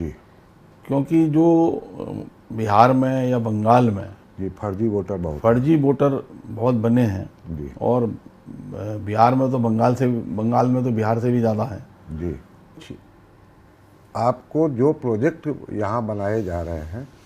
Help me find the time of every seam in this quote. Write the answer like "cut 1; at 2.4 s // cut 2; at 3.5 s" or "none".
cut 1; at 12.8 s